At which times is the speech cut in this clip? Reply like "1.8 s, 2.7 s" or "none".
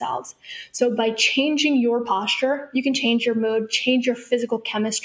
3.0 s